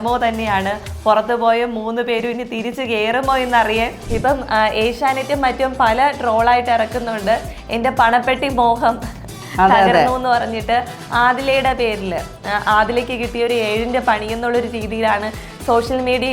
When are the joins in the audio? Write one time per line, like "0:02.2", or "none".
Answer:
0:04.0